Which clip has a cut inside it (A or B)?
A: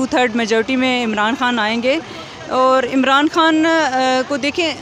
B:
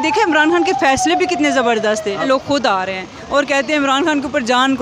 B